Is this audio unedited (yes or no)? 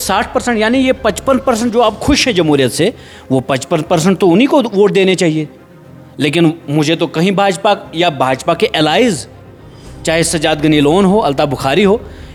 yes